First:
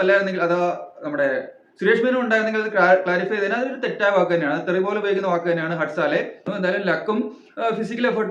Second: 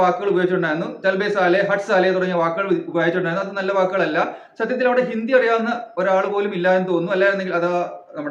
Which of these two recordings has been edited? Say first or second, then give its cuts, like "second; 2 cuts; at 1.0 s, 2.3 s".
first; 1 cut; at 6.5 s